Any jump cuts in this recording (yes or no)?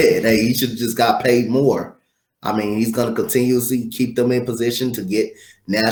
no